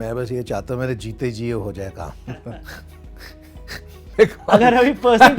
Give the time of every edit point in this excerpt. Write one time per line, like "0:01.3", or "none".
none